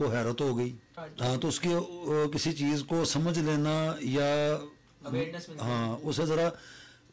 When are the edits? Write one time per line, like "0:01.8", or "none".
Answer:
0:01.0